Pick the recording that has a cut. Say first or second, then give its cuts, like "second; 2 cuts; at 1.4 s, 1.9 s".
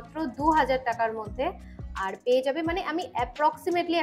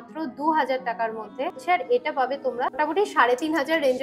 second; 2 cuts; at 1.6 s, 2.8 s